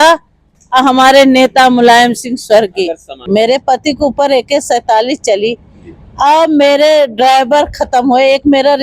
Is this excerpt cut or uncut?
cut